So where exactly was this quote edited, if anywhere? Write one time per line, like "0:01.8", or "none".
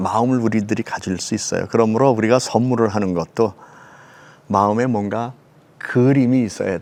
none